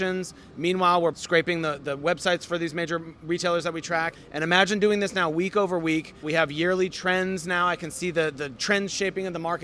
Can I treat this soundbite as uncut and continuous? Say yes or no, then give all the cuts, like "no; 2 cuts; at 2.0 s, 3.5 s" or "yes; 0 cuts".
no; 4 cuts; at 1.1 s, 4.2 s, 6.2 s, 8.5 s